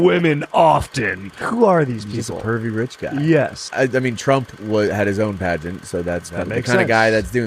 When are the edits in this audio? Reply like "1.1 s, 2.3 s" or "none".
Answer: 1.4 s, 3.6 s

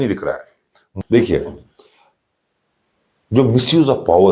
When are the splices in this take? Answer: 1.0 s

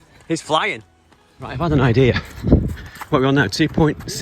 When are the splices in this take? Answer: 1.5 s

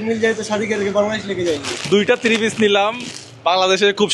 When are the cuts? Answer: none

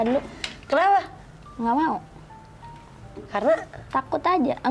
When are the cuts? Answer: none

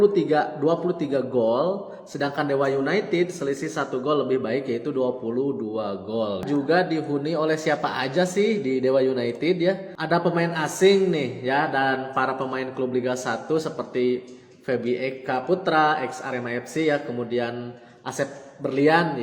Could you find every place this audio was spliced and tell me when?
6.4 s, 9.9 s

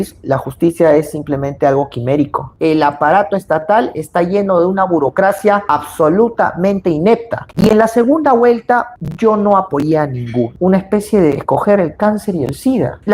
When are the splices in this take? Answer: 2.5 s, 7.4 s, 10.5 s

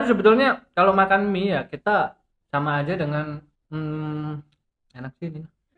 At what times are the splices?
2.3 s, 3.5 s

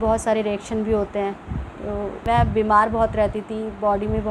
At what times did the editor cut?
2.2 s

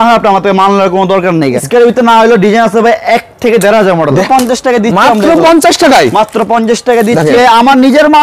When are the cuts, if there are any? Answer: 1.6 s, 4.2 s, 7.3 s

